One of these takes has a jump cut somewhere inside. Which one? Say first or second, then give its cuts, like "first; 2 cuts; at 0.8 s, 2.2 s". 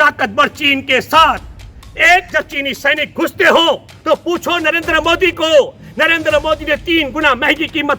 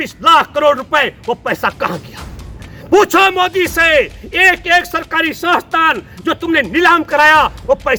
first; 1 cut; at 3.9 s